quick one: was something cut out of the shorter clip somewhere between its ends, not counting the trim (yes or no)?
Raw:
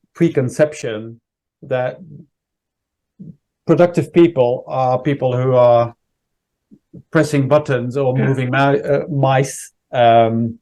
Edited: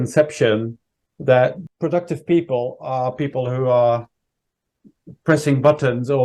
yes